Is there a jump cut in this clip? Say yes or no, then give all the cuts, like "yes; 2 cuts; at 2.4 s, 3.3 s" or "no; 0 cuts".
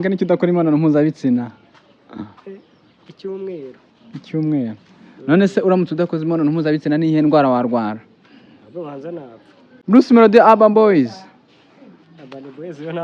yes; 1 cut; at 9.6 s